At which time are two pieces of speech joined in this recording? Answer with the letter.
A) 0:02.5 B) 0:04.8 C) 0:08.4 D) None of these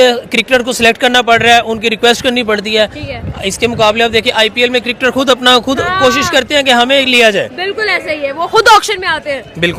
D